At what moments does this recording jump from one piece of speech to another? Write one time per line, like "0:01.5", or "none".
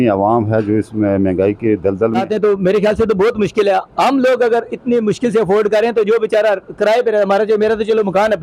0:02.2

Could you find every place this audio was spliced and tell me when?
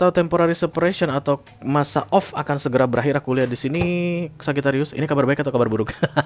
none

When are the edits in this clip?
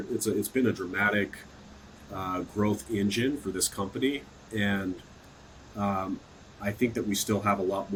none

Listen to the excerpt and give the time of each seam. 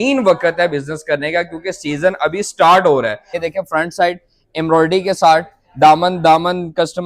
0:03.4

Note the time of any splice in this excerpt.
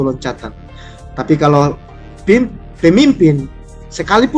none

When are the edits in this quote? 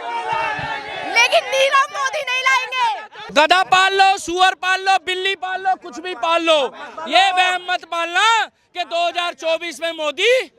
0:03.2

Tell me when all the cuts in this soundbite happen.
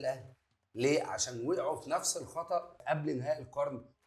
0:02.7

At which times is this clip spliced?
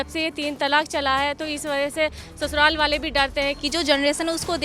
0:03.6

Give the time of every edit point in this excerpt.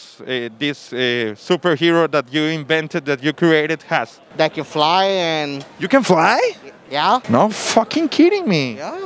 none

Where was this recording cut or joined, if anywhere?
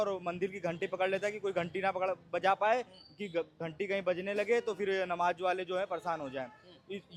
none

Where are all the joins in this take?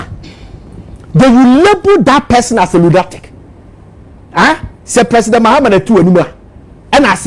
none

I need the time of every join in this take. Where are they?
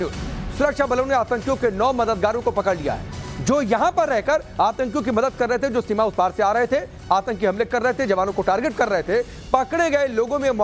none

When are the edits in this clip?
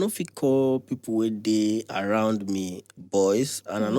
none

